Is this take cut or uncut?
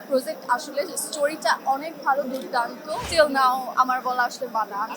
cut